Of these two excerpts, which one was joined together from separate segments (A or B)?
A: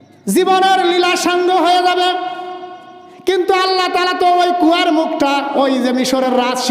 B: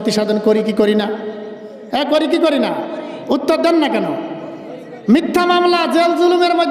A